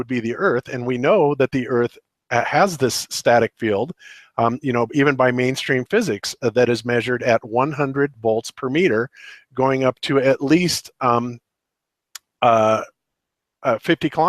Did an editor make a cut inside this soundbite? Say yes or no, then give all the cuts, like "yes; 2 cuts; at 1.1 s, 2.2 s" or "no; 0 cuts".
no; 0 cuts